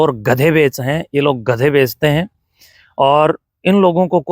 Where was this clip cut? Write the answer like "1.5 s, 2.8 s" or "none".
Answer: none